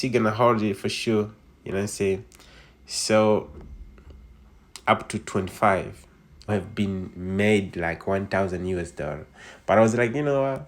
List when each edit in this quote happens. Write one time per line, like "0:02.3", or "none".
0:06.5